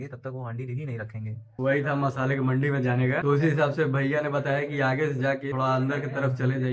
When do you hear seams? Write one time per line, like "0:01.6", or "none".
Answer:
none